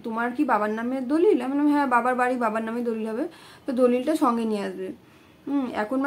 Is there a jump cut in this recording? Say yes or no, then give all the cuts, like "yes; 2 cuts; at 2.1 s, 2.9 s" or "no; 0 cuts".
no; 0 cuts